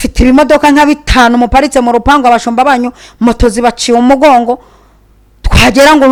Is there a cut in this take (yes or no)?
no